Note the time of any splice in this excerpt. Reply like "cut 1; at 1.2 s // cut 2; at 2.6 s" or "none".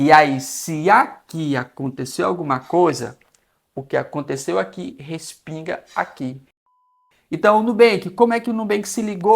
cut 1; at 6.7 s